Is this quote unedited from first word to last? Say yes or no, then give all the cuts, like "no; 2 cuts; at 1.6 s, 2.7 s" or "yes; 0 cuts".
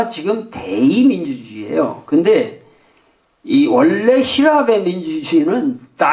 no; 1 cut; at 4.6 s